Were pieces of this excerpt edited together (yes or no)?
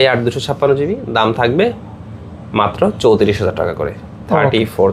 no